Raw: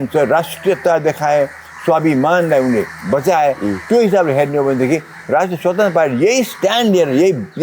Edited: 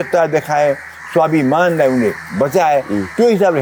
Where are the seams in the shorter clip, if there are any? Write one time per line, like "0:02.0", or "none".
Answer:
none